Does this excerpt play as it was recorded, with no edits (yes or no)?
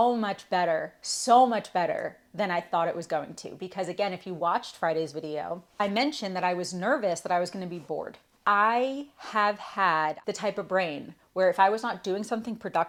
yes